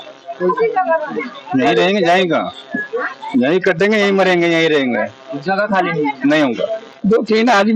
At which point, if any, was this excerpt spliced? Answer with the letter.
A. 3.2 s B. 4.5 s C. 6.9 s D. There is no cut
C